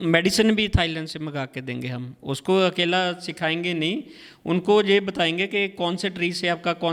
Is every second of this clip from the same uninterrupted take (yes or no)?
yes